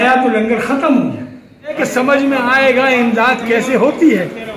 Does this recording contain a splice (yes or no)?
yes